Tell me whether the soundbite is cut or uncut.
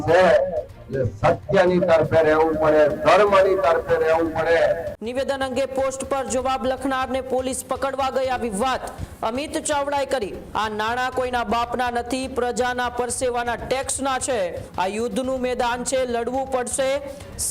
cut